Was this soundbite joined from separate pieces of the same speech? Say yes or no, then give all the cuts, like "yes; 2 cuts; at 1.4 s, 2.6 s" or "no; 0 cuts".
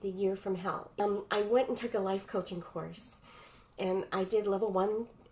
yes; 1 cut; at 1.0 s